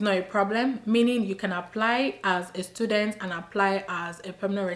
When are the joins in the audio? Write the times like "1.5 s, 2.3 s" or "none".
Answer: none

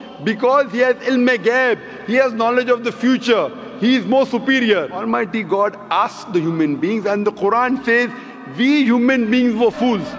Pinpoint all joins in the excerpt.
5.0 s

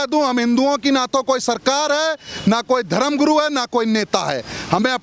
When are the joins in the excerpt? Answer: none

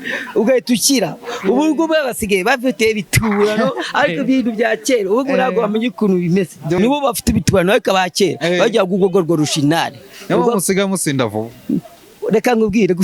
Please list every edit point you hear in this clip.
6.7 s

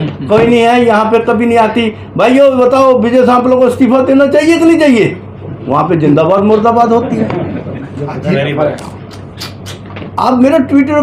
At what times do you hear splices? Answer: none

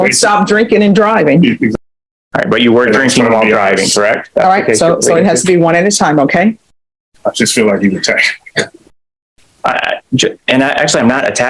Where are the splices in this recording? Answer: 1.7 s

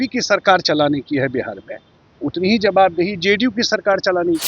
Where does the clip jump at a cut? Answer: none

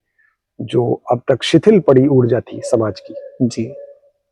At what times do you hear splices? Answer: none

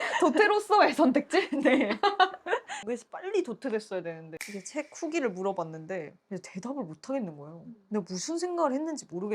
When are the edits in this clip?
2.9 s, 4.3 s

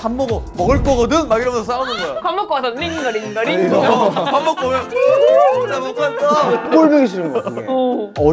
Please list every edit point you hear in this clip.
none

